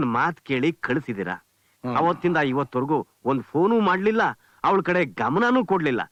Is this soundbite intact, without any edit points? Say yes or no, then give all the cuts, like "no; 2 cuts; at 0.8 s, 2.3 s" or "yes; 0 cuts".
yes; 0 cuts